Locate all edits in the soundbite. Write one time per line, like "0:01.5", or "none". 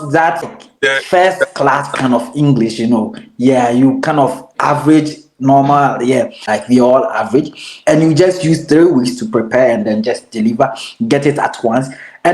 0:06.5